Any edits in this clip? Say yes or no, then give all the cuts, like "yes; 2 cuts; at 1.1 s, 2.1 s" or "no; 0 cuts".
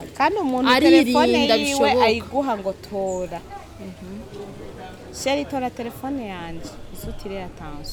no; 0 cuts